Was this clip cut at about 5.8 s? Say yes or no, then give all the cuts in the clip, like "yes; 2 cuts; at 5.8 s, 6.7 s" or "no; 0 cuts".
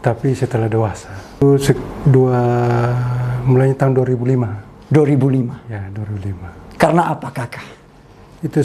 no; 1 cut; at 1.4 s